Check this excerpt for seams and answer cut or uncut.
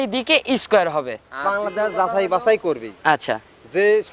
cut